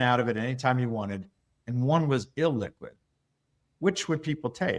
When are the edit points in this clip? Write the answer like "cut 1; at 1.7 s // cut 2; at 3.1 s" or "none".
none

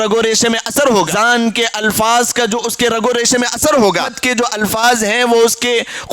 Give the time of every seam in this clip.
cut 1; at 1.1 s // cut 2; at 4.5 s

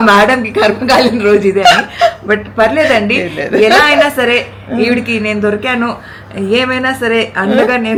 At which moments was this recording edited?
none

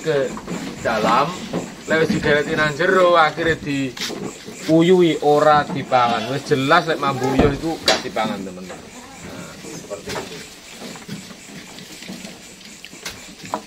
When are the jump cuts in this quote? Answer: none

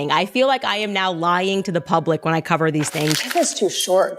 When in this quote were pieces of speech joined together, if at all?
cut 1; at 3.2 s

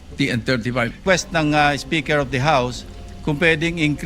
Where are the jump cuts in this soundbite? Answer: cut 1; at 1.0 s

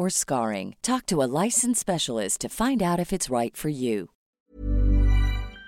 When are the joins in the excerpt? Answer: cut 1; at 4.4 s

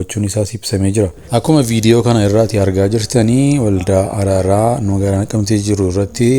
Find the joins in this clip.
cut 1; at 1.2 s

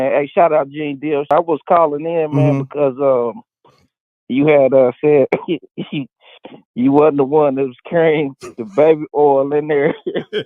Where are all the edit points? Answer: cut 1; at 1.3 s

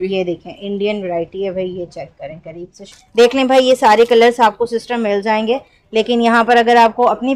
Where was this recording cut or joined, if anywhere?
cut 1; at 3.0 s

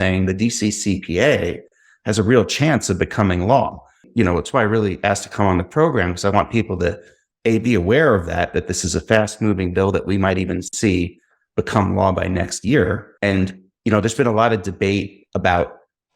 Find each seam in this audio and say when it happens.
cut 1; at 4.0 s // cut 2; at 10.7 s

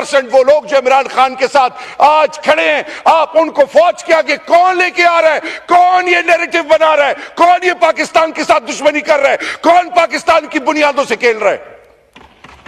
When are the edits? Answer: none

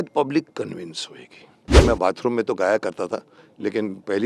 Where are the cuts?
cut 1; at 1.9 s

